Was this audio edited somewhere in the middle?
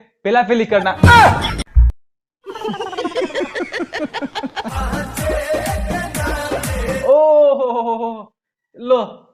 yes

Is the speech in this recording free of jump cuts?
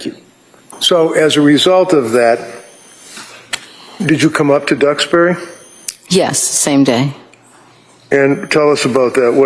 yes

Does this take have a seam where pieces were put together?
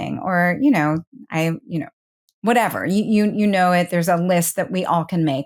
no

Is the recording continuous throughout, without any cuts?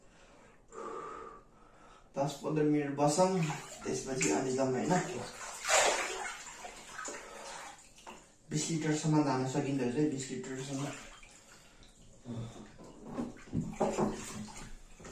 yes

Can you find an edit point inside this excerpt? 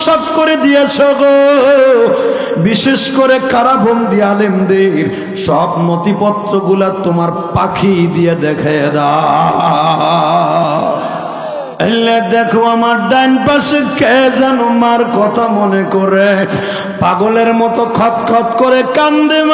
yes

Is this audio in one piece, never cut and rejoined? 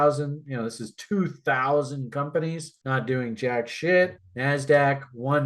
no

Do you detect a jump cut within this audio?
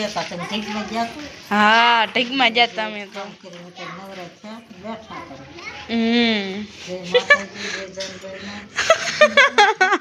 no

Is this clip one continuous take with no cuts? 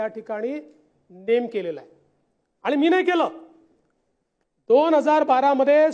yes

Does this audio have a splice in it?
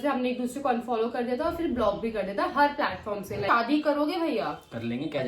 yes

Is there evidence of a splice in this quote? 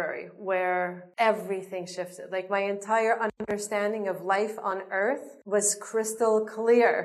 no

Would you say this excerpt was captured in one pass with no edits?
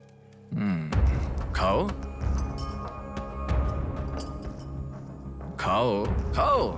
yes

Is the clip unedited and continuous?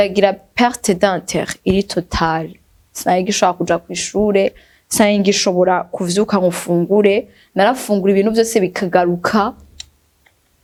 yes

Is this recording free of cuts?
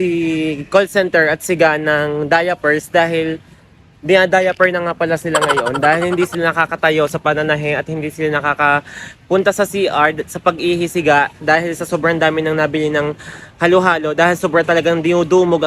yes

